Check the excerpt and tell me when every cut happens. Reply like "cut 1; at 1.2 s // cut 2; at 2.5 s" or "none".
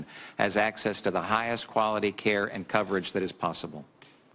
cut 1; at 2.9 s

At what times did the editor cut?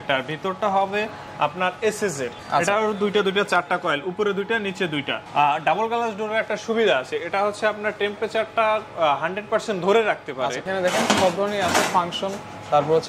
cut 1; at 2.4 s // cut 2; at 5.2 s // cut 3; at 10.6 s

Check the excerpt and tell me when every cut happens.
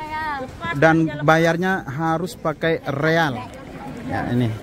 cut 1; at 3.6 s

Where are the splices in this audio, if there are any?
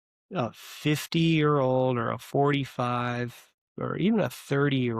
none

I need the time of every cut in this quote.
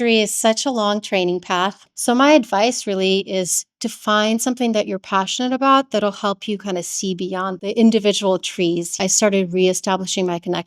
cut 1; at 1.9 s // cut 2; at 7.6 s // cut 3; at 9.0 s

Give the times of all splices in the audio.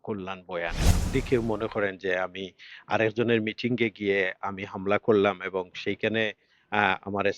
cut 1; at 1.1 s

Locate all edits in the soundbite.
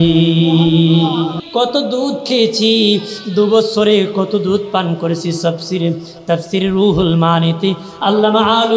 cut 1; at 1.4 s

